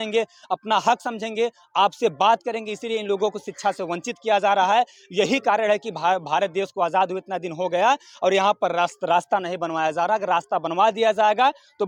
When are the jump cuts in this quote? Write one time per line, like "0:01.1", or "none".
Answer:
none